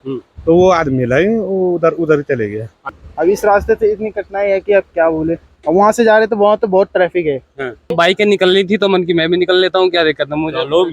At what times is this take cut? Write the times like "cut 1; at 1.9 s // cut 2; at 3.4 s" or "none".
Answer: cut 1; at 2.9 s // cut 2; at 7.9 s